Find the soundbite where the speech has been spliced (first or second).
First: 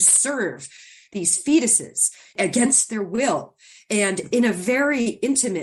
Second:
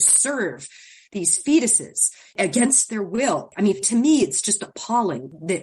second